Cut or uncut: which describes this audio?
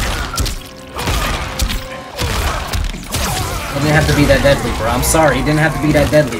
uncut